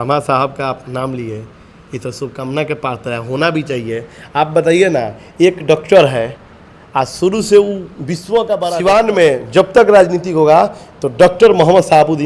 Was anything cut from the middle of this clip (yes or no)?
yes